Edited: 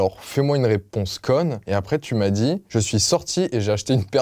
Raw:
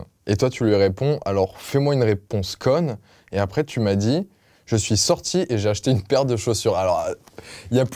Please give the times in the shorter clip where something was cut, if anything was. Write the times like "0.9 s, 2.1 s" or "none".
1.6 s, 2.6 s